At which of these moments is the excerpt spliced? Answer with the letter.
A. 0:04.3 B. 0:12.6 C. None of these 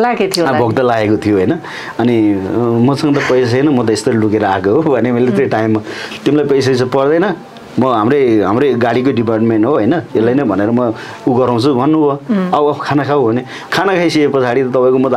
C